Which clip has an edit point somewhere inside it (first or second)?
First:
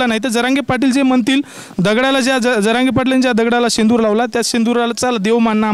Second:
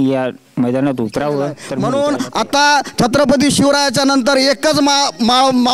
second